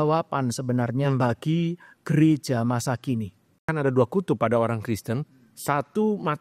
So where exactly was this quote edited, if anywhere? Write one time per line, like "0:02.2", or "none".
0:03.6